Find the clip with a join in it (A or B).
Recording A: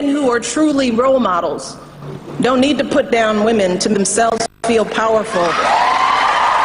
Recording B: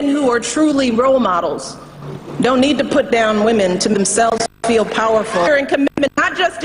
A